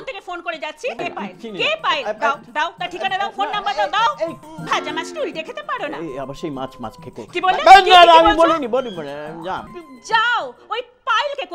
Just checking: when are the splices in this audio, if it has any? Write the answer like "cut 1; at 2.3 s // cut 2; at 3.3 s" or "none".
cut 1; at 1.0 s // cut 2; at 4.4 s // cut 3; at 9.7 s